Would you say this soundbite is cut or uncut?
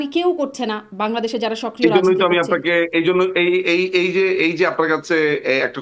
uncut